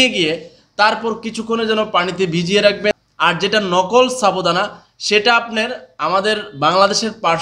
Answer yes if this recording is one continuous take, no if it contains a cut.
no